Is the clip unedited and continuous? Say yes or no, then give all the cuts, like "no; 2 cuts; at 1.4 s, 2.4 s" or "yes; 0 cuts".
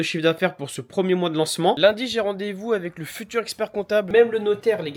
no; 2 cuts; at 1.8 s, 4.1 s